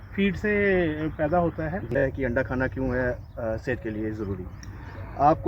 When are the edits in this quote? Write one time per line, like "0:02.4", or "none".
0:01.9